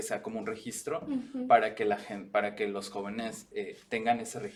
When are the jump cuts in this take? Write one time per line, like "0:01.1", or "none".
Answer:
none